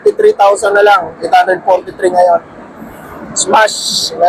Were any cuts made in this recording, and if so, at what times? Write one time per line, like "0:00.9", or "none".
none

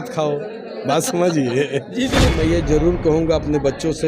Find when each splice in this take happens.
0:02.3

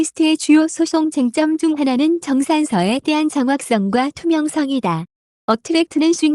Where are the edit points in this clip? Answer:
0:04.6

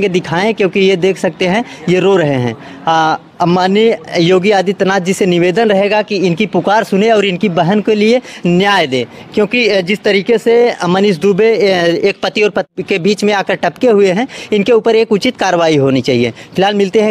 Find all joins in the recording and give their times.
none

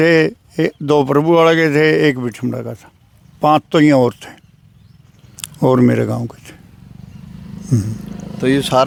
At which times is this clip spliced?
none

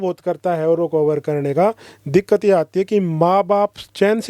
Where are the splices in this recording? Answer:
none

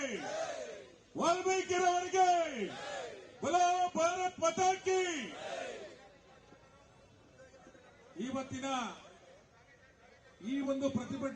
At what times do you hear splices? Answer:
0:08.1

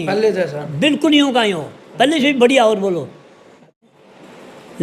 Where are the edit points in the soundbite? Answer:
0:03.9

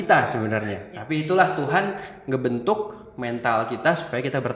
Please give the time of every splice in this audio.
none

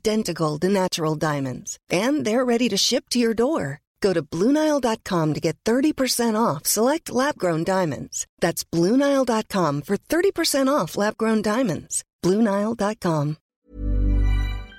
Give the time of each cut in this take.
0:13.5

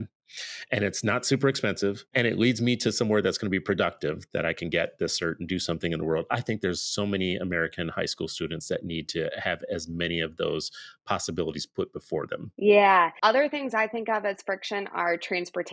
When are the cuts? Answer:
0:02.1
0:12.4
0:13.1

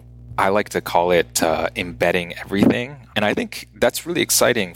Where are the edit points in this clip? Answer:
0:03.0

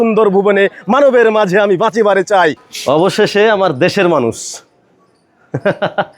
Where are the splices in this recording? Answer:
0:02.7

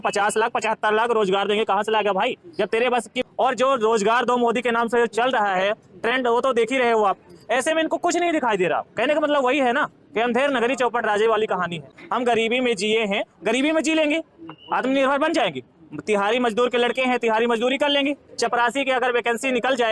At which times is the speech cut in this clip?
0:03.2
0:11.8
0:18.3

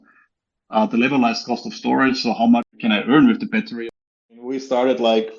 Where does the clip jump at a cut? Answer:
0:02.7
0:03.7

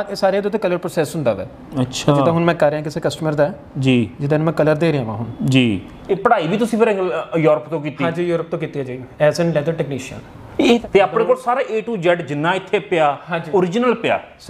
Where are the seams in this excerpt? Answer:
0:05.9
0:10.8

